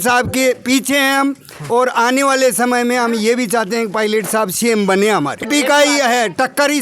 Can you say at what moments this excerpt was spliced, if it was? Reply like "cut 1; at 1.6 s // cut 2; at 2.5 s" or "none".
cut 1; at 5.5 s